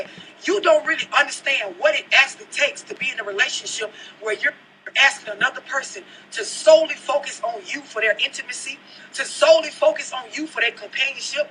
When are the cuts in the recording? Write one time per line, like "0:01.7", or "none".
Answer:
none